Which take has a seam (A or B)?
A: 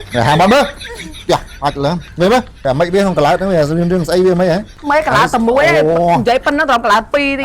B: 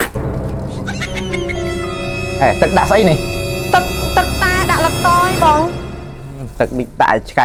A